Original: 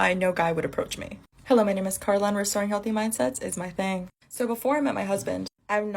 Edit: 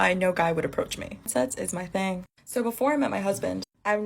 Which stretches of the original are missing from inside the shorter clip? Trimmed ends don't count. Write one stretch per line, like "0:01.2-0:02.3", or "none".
0:01.3-0:03.1